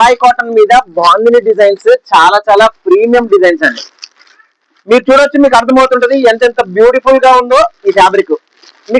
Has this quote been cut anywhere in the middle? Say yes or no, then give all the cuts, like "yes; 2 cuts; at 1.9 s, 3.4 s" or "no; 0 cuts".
no; 0 cuts